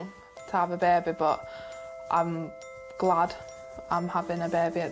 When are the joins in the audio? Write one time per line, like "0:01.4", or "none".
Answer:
none